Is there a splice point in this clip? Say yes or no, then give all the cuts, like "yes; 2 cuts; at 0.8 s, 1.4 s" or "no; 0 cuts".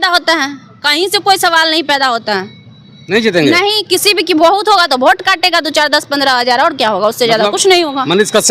no; 0 cuts